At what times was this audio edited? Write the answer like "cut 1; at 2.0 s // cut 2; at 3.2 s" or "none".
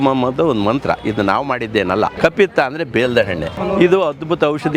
cut 1; at 2.1 s // cut 2; at 3.8 s